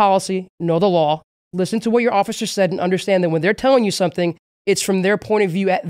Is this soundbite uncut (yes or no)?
yes